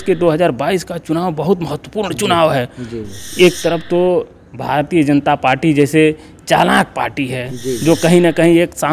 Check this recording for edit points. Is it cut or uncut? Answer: uncut